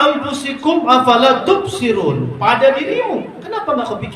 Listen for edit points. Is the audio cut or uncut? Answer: uncut